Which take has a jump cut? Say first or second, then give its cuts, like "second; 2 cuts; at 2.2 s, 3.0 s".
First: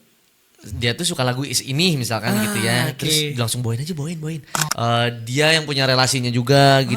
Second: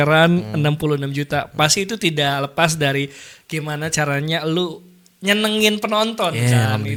first; 1 cut; at 4.6 s